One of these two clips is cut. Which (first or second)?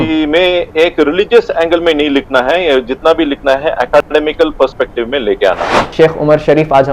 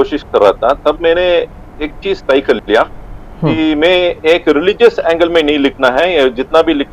first